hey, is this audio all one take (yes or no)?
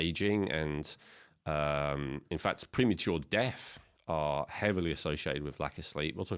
yes